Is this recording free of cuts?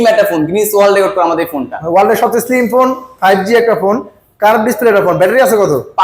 yes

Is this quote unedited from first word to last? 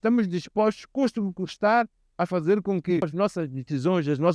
no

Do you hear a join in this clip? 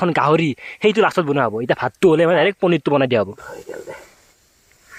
no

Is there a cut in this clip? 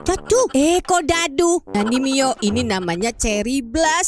yes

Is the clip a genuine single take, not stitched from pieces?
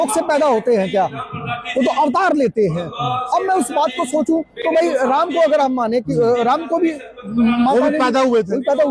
yes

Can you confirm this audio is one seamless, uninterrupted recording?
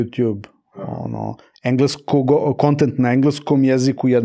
yes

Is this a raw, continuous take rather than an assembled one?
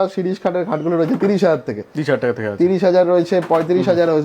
yes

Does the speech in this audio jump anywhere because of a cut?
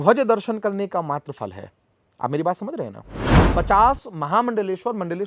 yes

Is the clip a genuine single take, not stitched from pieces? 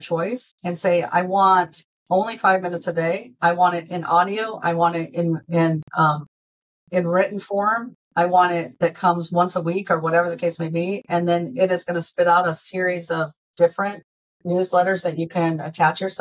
yes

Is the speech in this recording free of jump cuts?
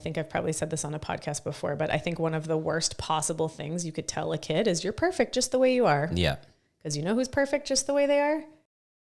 yes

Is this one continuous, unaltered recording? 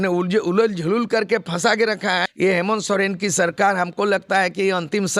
no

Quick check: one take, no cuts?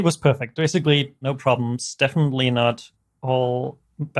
no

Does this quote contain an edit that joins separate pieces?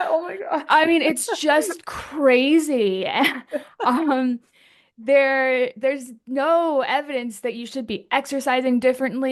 no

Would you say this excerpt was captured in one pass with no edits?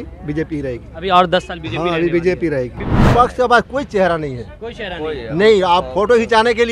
no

